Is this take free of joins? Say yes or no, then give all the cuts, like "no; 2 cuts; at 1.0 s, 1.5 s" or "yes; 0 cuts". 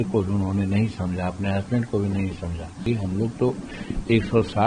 no; 1 cut; at 2.8 s